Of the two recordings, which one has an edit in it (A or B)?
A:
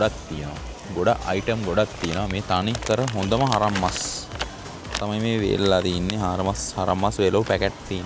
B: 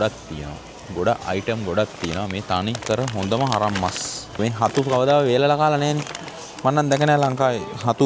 B